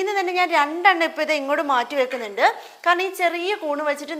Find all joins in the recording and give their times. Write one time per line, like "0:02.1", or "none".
none